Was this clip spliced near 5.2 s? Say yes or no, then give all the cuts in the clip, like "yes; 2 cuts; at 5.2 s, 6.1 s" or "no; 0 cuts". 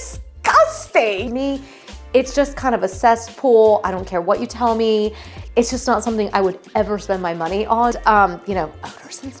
no; 2 cuts; at 1.2 s, 8.0 s